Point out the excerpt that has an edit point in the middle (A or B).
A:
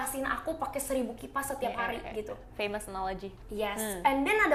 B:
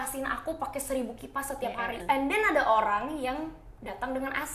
B